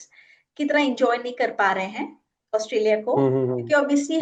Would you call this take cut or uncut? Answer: uncut